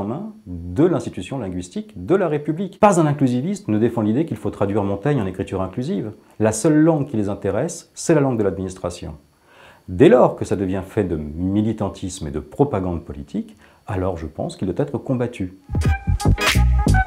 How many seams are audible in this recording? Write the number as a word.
one